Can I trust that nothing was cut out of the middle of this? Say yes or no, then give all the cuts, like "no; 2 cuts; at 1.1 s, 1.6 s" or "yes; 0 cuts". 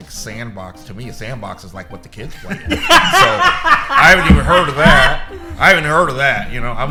yes; 0 cuts